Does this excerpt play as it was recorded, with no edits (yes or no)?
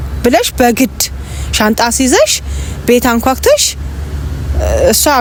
yes